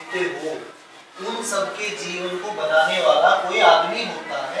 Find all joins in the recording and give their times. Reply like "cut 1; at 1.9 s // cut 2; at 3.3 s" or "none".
none